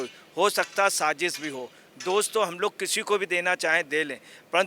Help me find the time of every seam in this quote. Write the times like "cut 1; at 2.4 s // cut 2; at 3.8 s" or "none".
none